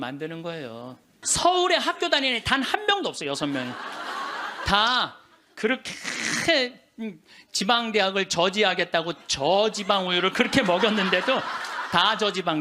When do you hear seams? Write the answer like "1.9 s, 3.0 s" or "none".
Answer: 1.1 s